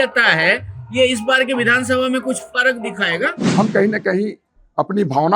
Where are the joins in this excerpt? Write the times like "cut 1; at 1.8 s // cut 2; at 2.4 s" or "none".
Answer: cut 1; at 3.4 s